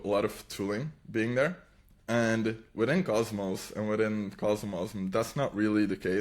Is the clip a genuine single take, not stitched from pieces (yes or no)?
yes